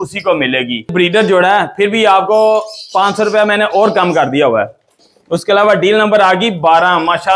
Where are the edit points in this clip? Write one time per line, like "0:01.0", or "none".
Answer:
0:00.9
0:04.9